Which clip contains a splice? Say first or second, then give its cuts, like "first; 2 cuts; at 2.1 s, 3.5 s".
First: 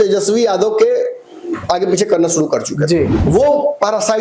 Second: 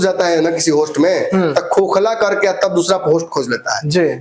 first; 1 cut; at 3.2 s